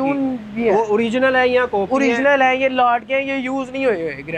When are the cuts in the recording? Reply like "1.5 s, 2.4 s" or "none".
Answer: none